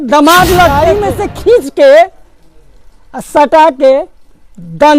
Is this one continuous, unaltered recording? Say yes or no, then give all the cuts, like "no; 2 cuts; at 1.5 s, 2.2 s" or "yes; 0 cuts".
no; 1 cut; at 0.9 s